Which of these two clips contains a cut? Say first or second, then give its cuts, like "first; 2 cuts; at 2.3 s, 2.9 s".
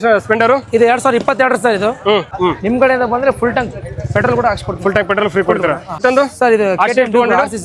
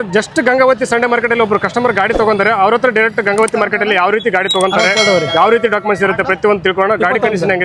first; 2 cuts; at 2.3 s, 6.0 s